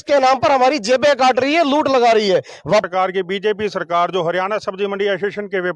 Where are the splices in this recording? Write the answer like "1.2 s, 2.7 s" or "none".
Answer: 2.8 s